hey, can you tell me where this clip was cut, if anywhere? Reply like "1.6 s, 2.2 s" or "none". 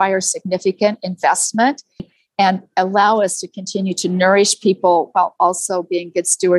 2.1 s